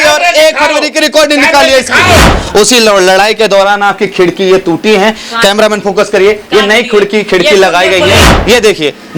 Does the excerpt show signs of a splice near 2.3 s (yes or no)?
yes